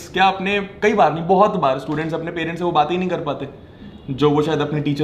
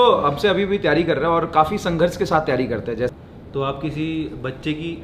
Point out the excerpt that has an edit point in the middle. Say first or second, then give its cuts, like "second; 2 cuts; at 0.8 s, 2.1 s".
second; 1 cut; at 3.1 s